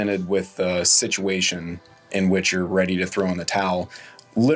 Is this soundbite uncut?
yes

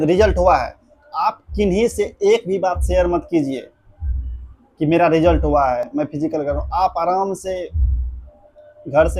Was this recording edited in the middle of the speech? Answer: no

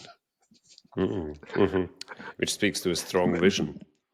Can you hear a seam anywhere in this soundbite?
no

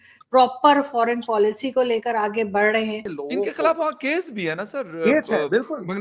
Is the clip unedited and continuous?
no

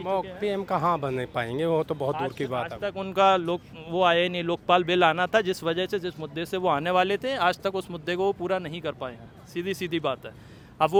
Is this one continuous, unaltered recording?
yes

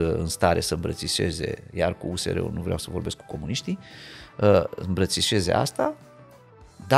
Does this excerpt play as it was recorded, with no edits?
yes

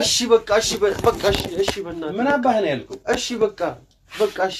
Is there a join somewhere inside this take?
no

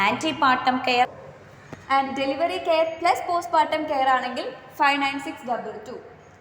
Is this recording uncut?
no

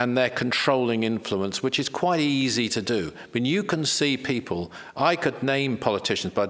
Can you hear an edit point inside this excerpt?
no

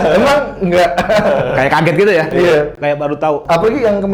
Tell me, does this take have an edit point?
no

